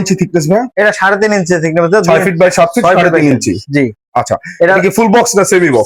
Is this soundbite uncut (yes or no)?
yes